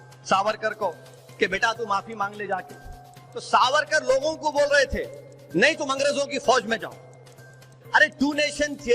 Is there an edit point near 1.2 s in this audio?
no; 2 cuts; at 3.2 s, 7.7 s

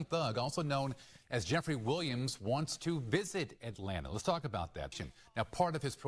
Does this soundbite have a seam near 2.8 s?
no; 1 cut; at 4.9 s

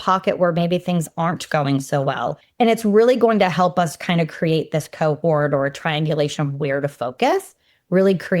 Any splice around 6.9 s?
no; 1 cut; at 2.4 s

